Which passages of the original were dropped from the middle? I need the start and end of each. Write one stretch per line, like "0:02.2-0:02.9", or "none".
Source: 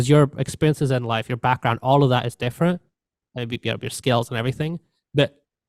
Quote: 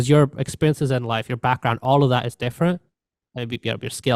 none